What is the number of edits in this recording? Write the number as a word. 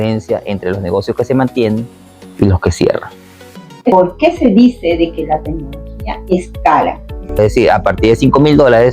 two